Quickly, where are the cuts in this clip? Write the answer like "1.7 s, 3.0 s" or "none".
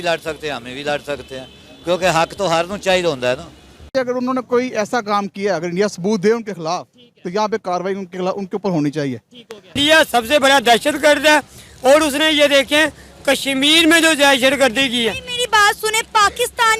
3.9 s, 9.8 s